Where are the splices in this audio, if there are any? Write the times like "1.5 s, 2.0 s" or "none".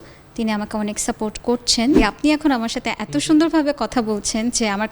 2.0 s